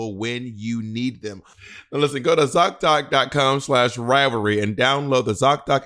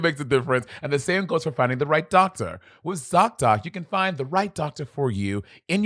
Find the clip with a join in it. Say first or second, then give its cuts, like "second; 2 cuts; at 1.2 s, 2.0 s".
first; 1 cut; at 1.8 s